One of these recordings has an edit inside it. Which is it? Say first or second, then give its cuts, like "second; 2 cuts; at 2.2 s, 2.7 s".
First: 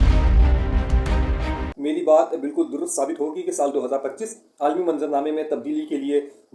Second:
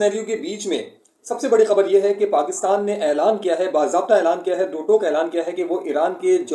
first; 1 cut; at 1.7 s